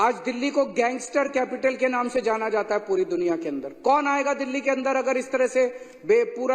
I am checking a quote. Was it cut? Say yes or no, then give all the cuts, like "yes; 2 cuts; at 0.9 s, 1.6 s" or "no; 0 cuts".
no; 0 cuts